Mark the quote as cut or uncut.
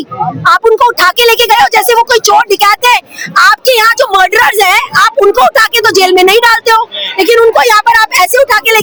uncut